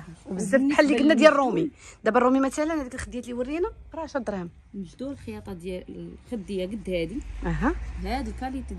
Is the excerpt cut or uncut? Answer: uncut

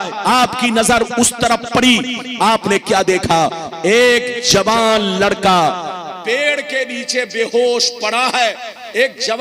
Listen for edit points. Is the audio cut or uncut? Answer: uncut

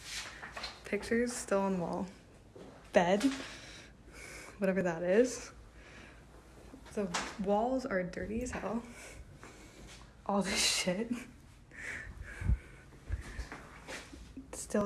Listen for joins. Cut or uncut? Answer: uncut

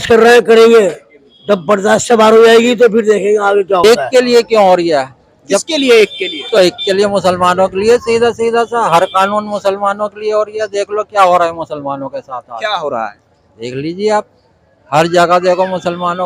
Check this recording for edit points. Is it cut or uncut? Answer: cut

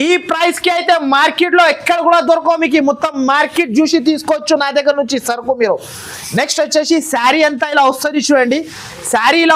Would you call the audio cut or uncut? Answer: uncut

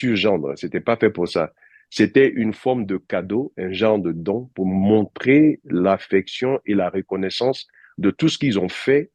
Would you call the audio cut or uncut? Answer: uncut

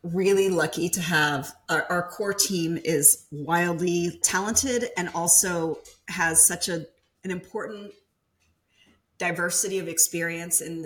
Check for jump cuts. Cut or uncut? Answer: cut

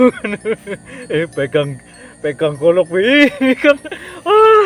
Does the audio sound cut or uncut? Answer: cut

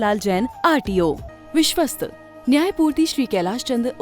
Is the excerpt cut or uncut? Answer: cut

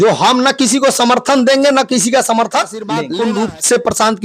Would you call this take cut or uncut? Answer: cut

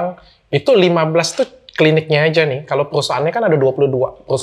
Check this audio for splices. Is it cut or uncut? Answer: uncut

